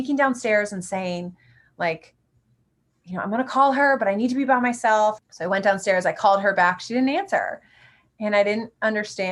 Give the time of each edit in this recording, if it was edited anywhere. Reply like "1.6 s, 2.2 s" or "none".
5.3 s